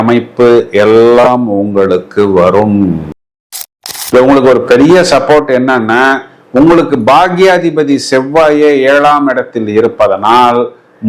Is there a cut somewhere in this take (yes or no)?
yes